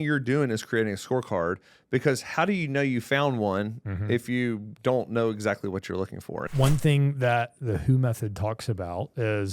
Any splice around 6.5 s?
yes; 1 cut; at 6.5 s

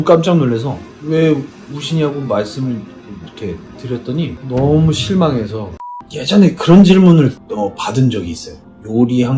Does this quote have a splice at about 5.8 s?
yes; 1 cut; at 5.8 s

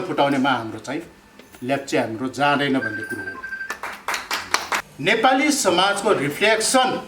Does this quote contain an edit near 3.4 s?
no; 1 cut; at 4.8 s

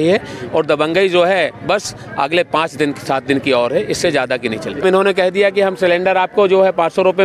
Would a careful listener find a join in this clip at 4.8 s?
yes; 1 cut; at 4.8 s

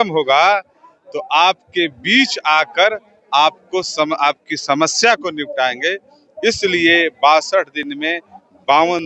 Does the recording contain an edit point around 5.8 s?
no; 0 cuts

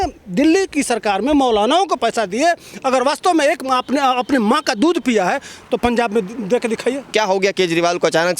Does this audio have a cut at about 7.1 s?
yes; 1 cut; at 7.1 s

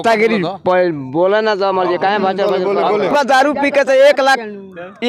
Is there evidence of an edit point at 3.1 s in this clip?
yes; 1 cut; at 3.1 s

